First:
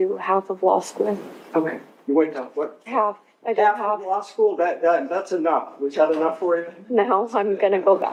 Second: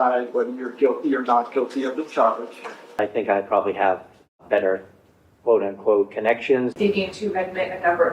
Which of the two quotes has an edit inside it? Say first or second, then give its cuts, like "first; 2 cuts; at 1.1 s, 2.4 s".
second; 2 cuts; at 3.0 s, 6.7 s